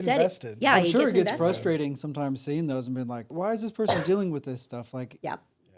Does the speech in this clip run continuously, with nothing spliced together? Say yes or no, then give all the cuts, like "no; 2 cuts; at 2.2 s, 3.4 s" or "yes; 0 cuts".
no; 1 cut; at 3.3 s